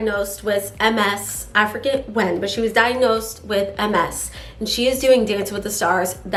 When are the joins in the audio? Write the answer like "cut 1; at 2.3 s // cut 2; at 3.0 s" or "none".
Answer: none